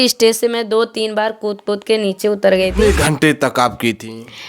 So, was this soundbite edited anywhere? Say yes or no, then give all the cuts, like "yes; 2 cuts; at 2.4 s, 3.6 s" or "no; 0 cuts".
yes; 1 cut; at 2.7 s